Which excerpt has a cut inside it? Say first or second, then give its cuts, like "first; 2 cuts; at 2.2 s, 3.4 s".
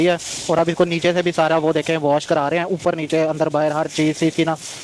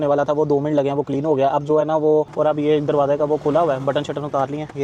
second; 1 cut; at 2.3 s